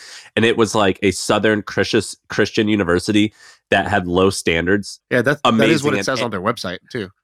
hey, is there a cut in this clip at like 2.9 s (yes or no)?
no